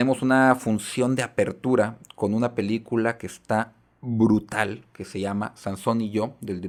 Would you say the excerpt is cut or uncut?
uncut